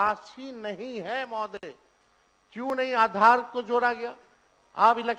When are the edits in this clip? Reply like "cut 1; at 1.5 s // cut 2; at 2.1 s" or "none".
none